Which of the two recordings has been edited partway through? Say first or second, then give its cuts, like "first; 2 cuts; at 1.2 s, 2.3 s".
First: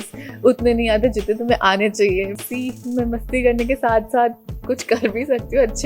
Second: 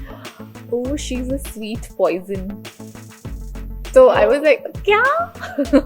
first; 1 cut; at 2.3 s